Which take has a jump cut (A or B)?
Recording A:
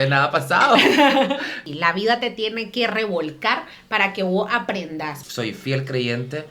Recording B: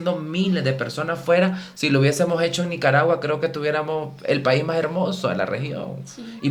A